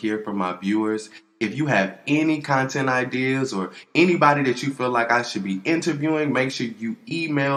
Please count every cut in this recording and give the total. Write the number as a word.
zero